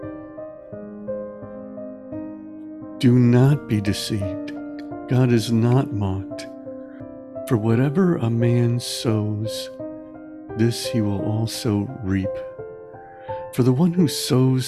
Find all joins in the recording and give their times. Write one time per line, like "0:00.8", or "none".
0:02.5